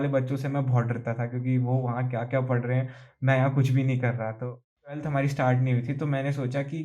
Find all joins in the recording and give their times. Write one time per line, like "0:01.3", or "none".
0:04.9